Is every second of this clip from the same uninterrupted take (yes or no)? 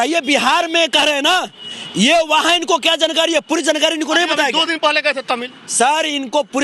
yes